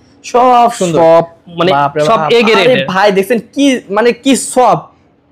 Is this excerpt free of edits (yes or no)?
yes